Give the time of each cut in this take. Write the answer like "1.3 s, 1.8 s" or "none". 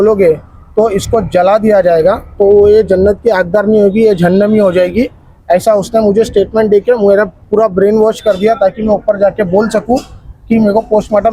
none